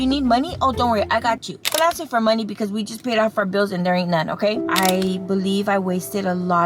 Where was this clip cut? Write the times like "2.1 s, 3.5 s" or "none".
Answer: 1.6 s, 4.7 s

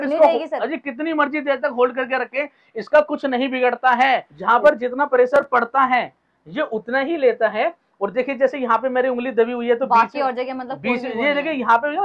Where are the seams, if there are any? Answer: 4.3 s

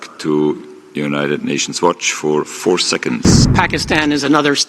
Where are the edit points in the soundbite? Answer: 3.4 s

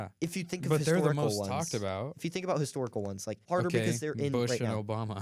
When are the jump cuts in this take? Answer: 3.4 s

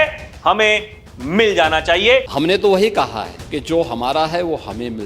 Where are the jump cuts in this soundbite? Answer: 2.3 s, 3.3 s

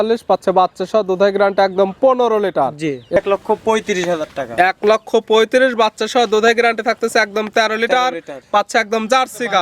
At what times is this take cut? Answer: 3.2 s

